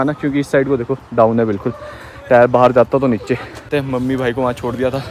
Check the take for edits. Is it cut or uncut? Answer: uncut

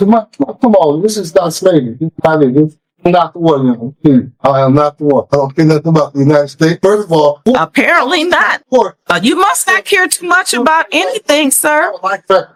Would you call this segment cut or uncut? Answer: uncut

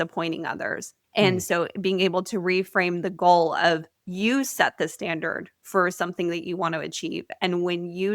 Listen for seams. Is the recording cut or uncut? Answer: cut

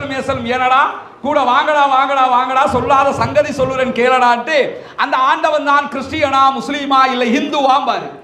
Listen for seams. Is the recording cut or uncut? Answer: uncut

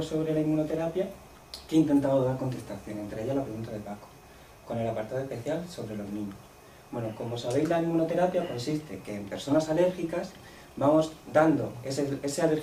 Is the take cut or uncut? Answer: uncut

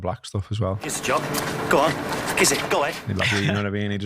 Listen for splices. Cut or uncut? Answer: cut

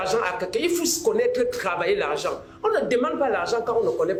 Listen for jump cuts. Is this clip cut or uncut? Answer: uncut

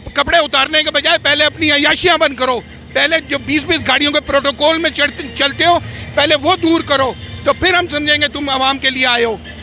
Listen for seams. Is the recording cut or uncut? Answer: uncut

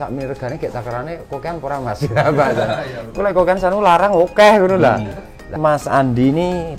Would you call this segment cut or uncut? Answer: cut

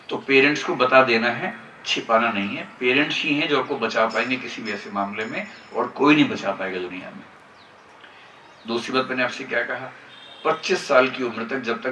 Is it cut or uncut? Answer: uncut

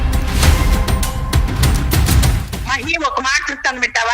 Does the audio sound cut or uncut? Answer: cut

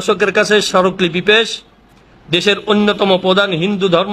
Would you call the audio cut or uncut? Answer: uncut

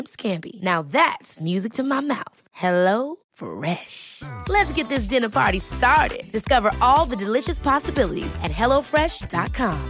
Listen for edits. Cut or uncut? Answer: uncut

